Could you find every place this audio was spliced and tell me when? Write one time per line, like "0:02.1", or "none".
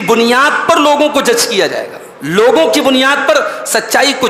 none